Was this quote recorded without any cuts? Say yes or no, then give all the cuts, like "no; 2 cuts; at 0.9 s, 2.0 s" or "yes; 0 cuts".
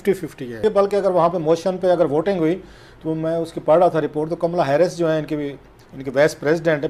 yes; 0 cuts